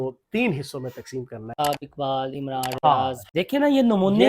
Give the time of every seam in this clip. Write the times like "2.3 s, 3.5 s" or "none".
1.6 s, 3.2 s